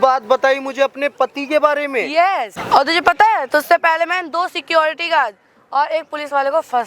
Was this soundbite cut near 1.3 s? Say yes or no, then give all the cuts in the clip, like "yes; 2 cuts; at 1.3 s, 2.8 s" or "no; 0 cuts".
no; 1 cut; at 2.6 s